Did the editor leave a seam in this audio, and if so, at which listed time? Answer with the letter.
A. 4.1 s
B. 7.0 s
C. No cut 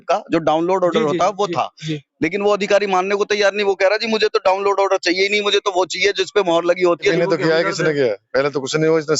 B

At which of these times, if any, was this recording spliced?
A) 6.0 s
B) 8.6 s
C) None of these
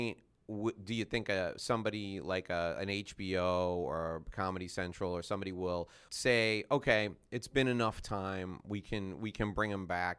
A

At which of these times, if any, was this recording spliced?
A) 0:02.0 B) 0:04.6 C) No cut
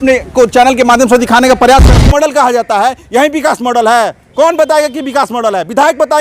A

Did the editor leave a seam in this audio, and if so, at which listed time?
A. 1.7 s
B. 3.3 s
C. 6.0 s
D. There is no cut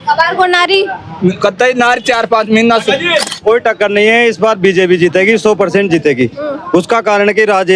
B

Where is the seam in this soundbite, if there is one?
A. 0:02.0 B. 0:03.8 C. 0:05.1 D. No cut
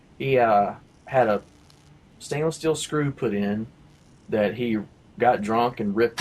B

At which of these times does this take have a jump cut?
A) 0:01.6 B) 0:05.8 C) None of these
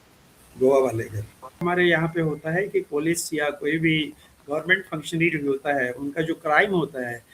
A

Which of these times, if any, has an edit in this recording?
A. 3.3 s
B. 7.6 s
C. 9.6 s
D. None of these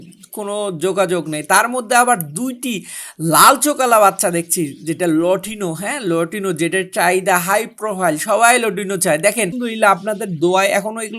C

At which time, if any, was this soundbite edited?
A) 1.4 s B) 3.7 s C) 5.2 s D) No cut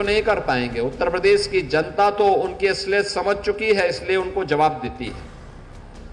C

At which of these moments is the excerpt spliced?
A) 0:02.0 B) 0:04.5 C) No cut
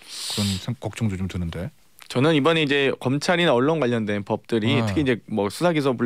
C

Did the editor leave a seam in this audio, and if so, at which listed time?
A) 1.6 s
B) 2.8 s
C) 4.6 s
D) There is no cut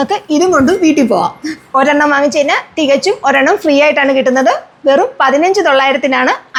D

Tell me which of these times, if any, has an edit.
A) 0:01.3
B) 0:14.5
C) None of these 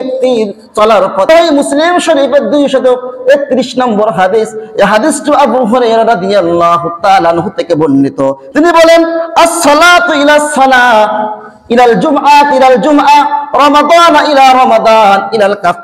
A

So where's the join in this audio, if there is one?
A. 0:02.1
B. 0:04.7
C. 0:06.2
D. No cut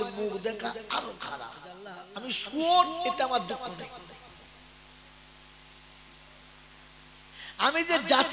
A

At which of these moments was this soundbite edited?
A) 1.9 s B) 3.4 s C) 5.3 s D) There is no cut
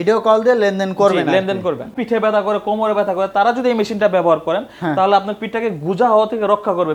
A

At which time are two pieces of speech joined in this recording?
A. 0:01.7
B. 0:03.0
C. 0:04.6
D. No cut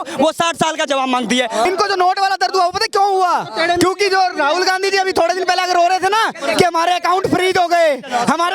A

